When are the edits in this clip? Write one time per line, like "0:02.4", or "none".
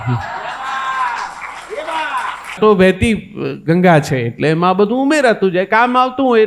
0:02.6